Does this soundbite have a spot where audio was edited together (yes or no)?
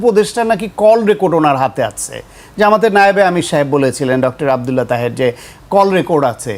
no